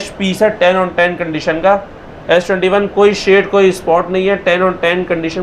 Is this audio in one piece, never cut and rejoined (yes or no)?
yes